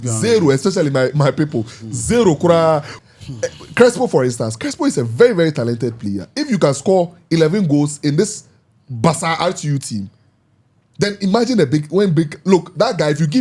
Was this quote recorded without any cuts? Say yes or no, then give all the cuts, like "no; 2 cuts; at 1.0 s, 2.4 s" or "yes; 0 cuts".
no; 1 cut; at 2.9 s